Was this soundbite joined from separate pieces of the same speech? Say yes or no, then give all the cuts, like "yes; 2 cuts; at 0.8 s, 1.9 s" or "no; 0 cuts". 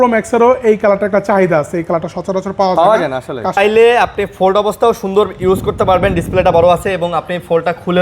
yes; 1 cut; at 3.6 s